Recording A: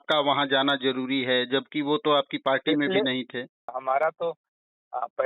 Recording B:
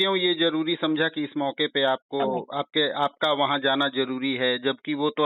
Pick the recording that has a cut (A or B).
A